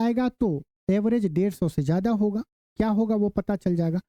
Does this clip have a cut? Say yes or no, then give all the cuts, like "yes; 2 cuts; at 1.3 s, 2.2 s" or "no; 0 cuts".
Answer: no; 0 cuts